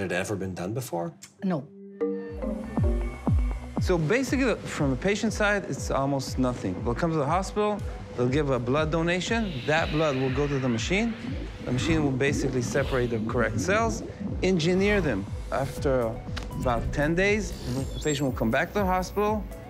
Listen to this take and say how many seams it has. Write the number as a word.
one